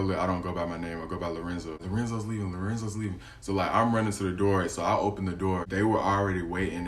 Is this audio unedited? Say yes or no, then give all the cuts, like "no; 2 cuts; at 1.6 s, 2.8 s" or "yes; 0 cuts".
no; 2 cuts; at 1.8 s, 5.7 s